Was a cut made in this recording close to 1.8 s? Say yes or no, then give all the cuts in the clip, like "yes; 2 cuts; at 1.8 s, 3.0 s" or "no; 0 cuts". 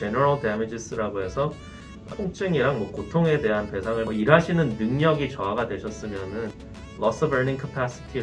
no; 1 cut; at 4.1 s